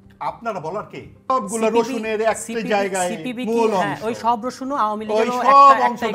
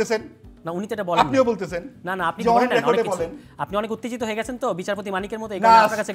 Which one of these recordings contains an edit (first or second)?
first